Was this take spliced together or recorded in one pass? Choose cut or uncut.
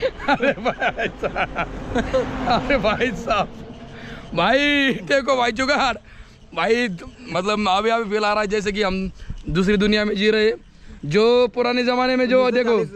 uncut